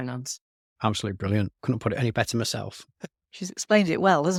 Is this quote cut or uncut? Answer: uncut